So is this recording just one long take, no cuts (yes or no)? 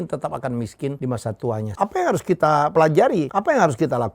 no